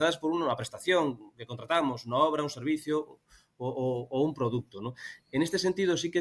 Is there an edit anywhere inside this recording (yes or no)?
no